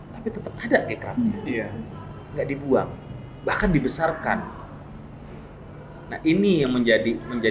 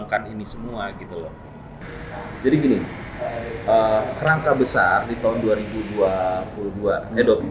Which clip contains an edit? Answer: second; 1 cut; at 1.8 s

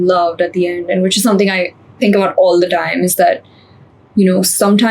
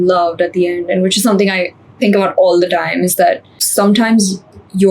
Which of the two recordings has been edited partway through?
second; 1 cut; at 3.7 s

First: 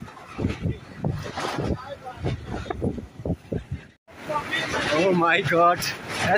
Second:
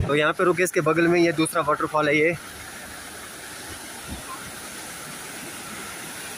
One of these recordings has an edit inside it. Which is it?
first; 1 cut; at 4.0 s

